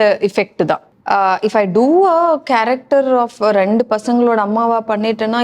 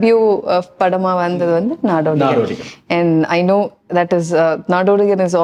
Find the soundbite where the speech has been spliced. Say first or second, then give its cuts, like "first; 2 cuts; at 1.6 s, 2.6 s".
first; 1 cut; at 0.9 s